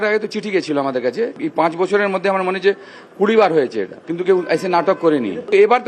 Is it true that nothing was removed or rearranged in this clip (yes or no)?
no